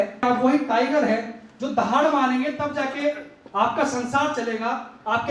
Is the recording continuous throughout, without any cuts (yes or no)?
yes